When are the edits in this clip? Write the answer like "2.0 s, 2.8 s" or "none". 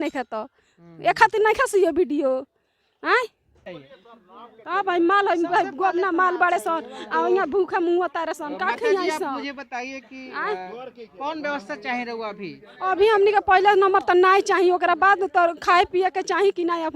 none